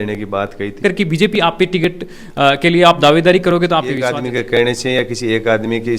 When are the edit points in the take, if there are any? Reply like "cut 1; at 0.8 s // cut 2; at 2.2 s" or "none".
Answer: cut 1; at 0.8 s // cut 2; at 4.1 s